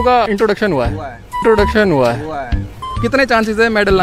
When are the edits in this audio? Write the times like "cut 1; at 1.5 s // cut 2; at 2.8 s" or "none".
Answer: cut 1; at 1.4 s // cut 2; at 2.9 s